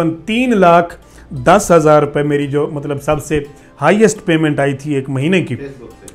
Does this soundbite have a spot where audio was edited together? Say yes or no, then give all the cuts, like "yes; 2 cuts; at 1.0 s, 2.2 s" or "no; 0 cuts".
no; 0 cuts